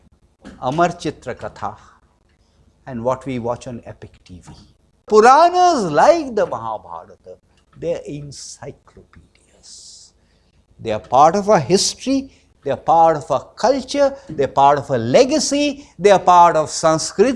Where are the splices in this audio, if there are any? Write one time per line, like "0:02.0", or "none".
0:05.1